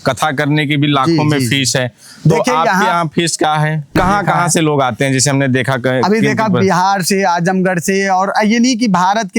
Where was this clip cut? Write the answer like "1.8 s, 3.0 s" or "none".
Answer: 3.9 s